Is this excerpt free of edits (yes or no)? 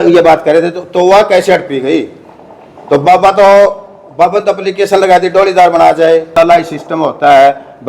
no